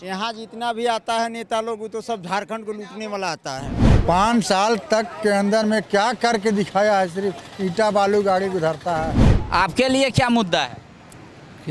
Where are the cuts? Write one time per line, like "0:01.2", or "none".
0:03.8
0:09.3